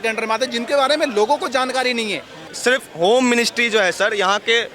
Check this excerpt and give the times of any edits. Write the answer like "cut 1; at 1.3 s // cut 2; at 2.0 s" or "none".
cut 1; at 2.5 s